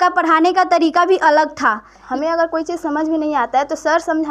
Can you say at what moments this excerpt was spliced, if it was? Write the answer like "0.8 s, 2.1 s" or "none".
2.0 s